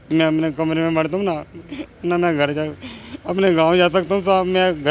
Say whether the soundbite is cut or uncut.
uncut